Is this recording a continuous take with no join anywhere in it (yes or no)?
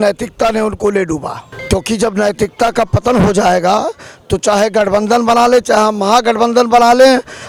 yes